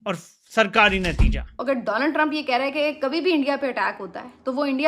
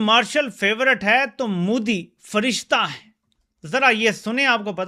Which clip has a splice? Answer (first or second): first